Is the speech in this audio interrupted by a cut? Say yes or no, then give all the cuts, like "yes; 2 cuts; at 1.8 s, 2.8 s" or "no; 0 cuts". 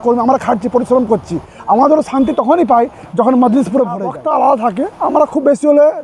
yes; 1 cut; at 4.1 s